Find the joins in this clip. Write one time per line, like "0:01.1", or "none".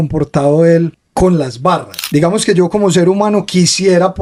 0:01.0
0:01.9

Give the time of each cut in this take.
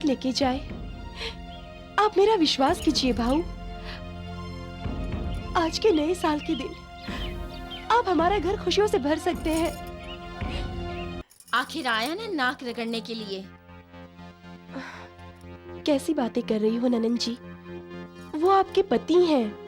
0:11.2

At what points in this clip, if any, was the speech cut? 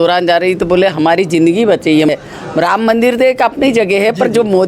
0:02.1

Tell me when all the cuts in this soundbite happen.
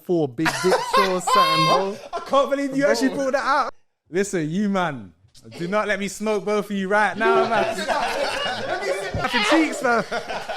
0:03.8
0:09.3

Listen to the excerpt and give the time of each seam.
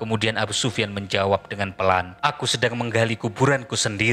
0:02.1

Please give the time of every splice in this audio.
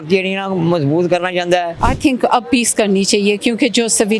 0:01.7

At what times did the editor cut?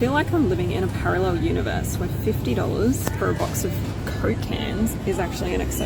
none

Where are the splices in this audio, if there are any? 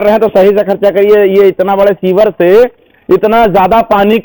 none

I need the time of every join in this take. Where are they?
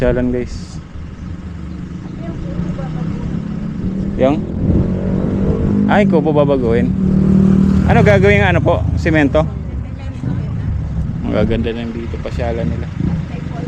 none

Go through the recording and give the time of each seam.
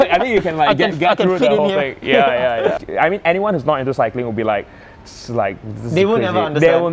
0:02.8

